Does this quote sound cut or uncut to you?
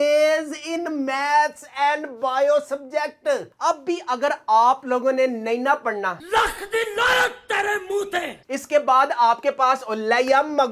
cut